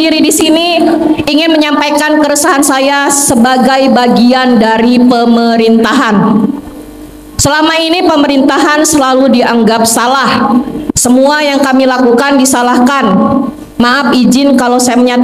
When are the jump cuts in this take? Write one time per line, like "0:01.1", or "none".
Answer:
none